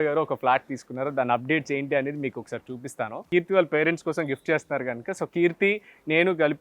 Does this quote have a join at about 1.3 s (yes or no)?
no